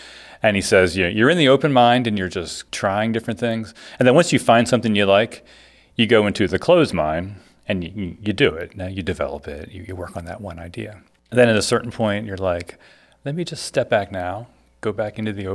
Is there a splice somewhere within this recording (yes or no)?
yes